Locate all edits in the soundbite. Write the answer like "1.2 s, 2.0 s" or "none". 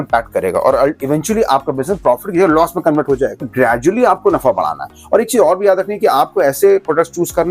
3.5 s